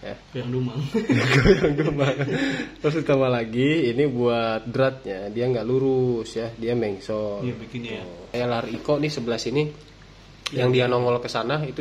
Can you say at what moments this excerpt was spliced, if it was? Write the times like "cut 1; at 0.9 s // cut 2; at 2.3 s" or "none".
cut 1; at 8.3 s